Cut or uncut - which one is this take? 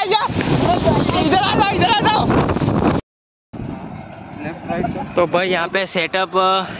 cut